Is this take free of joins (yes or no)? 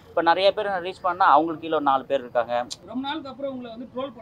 no